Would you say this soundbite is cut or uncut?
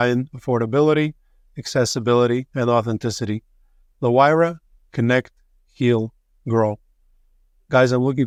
uncut